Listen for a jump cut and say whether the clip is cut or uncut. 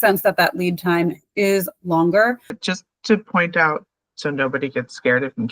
cut